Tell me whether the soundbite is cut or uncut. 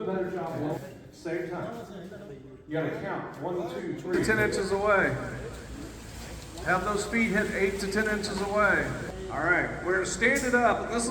cut